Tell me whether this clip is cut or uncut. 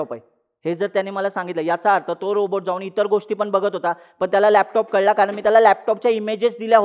uncut